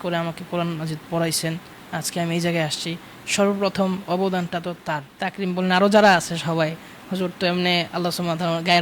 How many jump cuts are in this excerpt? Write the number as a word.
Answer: one